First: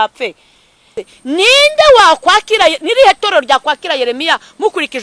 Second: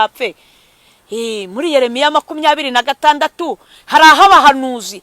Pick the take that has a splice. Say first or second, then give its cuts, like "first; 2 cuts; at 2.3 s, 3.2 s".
first; 1 cut; at 1.1 s